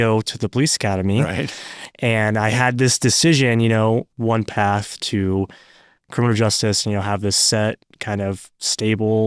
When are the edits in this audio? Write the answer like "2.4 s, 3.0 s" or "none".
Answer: 4.1 s